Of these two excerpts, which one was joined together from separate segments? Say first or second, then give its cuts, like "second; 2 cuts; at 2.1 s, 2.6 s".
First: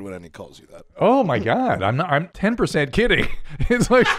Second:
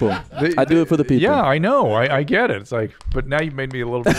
first; 1 cut; at 2.3 s